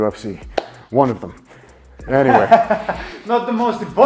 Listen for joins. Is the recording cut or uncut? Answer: uncut